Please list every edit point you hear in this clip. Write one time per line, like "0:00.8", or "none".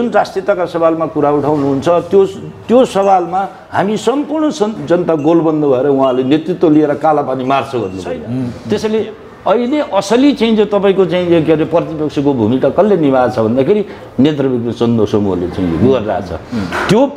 0:08.5